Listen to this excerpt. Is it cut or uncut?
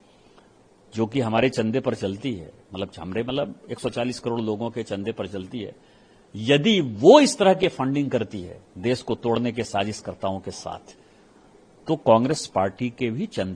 uncut